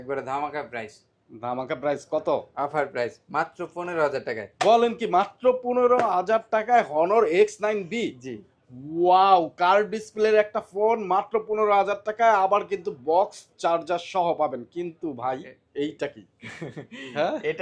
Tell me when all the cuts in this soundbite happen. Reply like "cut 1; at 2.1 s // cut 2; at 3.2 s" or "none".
none

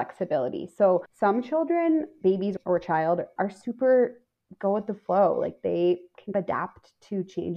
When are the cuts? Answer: cut 1; at 1.1 s

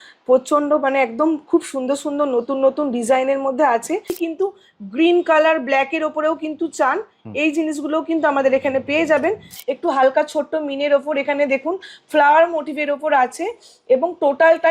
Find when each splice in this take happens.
cut 1; at 4.2 s // cut 2; at 9.5 s

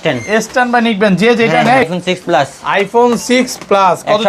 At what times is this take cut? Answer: cut 1; at 1.9 s

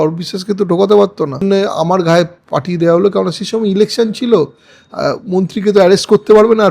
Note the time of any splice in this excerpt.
cut 1; at 1.4 s

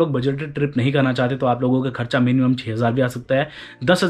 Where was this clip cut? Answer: none

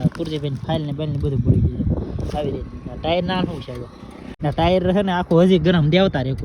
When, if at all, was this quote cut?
cut 1; at 4.3 s

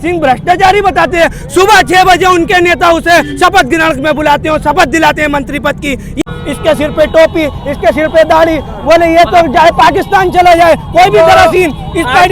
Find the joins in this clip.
cut 1; at 6.2 s

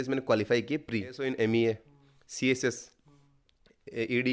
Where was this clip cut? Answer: cut 1; at 1.2 s

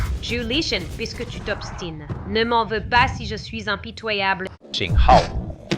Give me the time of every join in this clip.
cut 1; at 4.6 s

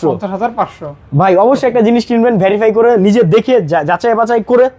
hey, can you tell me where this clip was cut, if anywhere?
none

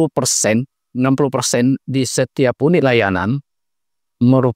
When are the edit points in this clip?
none

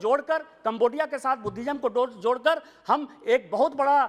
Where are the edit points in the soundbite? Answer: none

